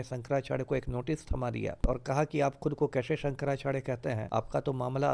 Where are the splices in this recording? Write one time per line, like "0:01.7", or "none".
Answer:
0:01.8
0:04.2